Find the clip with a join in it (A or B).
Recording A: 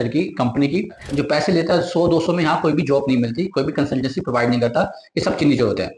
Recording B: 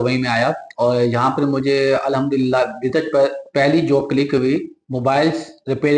A